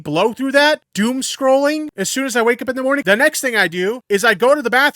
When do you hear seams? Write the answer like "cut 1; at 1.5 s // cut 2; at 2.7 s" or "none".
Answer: cut 1; at 0.9 s // cut 2; at 2.0 s // cut 3; at 3.0 s // cut 4; at 4.0 s

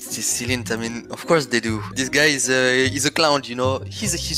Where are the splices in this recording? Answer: cut 1; at 2.0 s

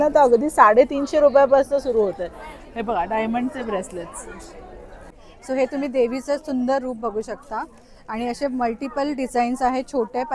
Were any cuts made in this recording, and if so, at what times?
cut 1; at 5.2 s

